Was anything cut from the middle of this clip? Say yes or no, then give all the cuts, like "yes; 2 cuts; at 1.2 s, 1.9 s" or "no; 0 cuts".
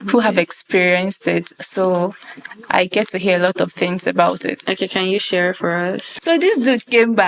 yes; 1 cut; at 6.1 s